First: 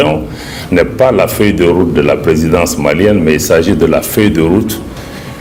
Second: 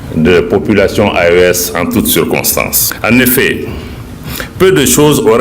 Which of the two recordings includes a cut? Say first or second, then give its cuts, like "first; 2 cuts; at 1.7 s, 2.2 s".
second; 1 cut; at 2.8 s